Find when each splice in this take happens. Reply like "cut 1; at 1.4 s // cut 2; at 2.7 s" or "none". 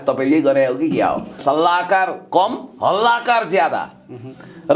cut 1; at 1.4 s